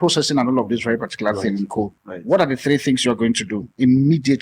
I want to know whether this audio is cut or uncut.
cut